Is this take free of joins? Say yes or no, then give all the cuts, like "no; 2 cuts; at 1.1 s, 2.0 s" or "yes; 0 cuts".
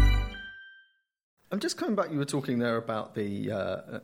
yes; 0 cuts